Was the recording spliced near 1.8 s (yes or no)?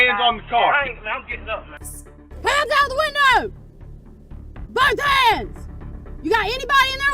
yes